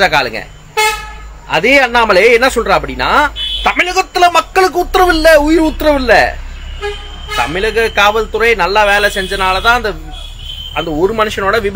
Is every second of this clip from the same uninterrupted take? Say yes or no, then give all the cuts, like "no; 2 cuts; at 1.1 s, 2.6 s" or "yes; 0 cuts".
yes; 0 cuts